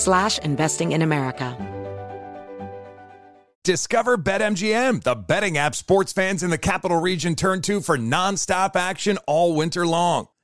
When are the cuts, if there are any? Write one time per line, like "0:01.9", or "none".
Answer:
0:01.5